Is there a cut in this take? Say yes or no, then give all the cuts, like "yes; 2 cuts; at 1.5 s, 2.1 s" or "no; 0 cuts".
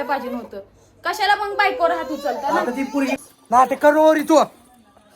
yes; 1 cut; at 3.2 s